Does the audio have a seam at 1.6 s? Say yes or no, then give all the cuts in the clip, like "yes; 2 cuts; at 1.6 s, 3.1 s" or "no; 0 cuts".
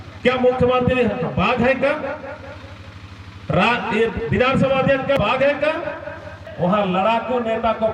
no; 2 cuts; at 5.2 s, 6.4 s